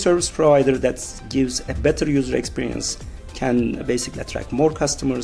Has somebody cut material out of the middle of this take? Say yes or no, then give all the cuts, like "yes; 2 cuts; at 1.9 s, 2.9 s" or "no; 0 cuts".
no; 0 cuts